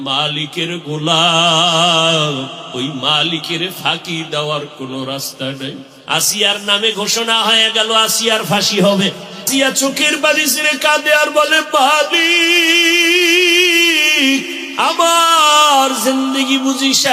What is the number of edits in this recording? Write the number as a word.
three